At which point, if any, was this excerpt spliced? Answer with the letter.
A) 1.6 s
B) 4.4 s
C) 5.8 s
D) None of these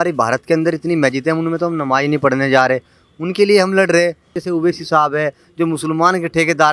B